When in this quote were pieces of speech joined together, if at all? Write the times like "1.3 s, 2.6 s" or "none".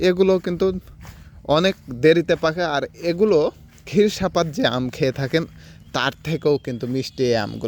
none